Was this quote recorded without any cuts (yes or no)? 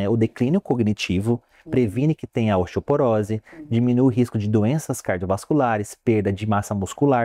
yes